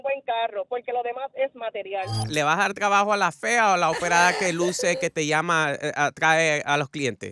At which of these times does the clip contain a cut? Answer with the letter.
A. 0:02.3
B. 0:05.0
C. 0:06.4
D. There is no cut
A